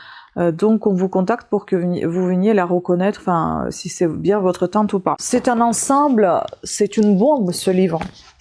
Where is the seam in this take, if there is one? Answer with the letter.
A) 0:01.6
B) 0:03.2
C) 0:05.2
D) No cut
C